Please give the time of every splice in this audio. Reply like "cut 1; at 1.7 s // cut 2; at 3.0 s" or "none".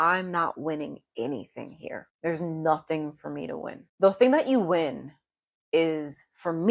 cut 1; at 2.1 s // cut 2; at 3.8 s